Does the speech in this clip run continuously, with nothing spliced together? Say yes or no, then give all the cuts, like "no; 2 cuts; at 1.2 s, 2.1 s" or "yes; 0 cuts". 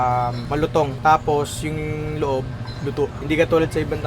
no; 1 cut; at 0.9 s